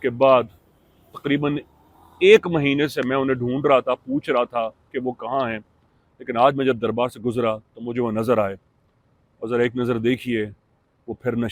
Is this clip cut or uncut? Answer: uncut